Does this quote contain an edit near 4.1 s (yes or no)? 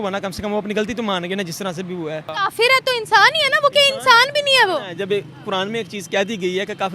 no